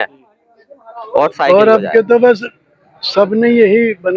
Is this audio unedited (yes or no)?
no